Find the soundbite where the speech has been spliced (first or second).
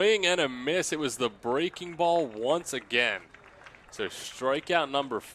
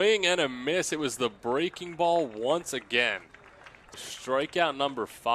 second